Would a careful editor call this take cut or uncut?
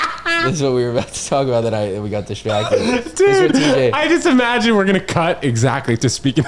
uncut